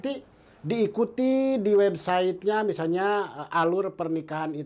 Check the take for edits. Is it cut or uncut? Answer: uncut